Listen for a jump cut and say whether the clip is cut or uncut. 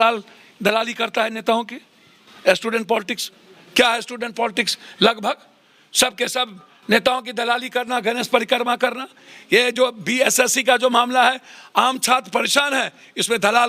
uncut